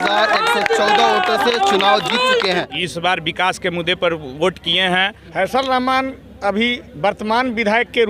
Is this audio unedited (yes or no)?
no